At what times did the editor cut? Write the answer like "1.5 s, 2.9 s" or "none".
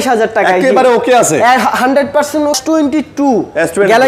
2.6 s